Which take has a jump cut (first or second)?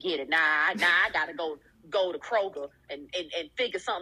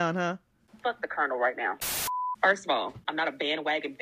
second